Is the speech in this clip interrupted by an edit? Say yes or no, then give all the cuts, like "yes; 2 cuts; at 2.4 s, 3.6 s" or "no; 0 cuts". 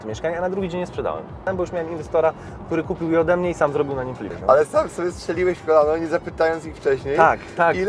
yes; 2 cuts; at 1.5 s, 4.3 s